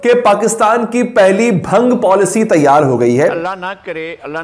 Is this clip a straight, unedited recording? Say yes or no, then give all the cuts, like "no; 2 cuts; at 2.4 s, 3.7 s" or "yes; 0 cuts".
no; 1 cut; at 3.4 s